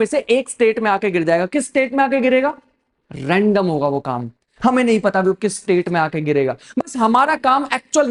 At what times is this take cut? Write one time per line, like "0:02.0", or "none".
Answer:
none